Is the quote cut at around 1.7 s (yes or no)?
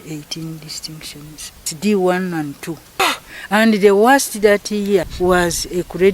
yes